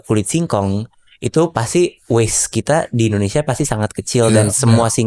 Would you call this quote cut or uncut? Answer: uncut